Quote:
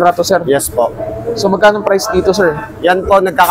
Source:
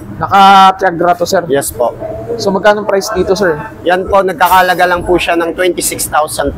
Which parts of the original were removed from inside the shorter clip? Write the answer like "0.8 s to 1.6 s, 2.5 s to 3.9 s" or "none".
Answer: none